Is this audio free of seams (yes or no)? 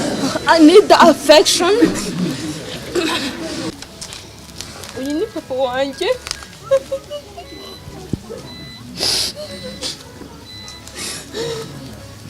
no